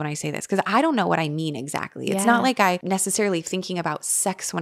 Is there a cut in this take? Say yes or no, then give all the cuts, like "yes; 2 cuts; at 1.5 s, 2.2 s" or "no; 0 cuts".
yes; 1 cut; at 2.8 s